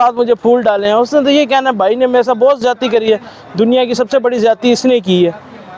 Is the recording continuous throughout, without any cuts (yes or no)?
yes